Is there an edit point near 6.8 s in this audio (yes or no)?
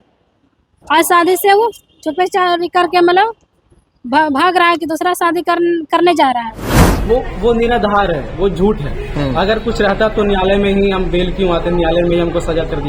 yes